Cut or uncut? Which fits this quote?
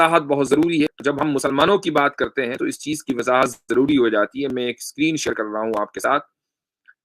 cut